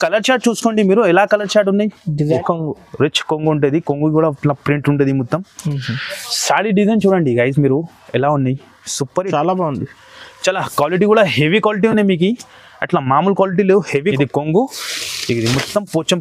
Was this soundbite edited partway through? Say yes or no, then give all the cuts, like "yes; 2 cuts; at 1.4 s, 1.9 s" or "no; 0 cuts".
yes; 2 cuts; at 2.4 s, 14.1 s